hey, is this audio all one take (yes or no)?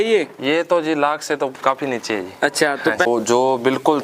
no